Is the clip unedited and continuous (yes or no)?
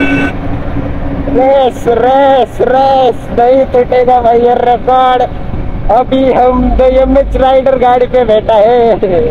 yes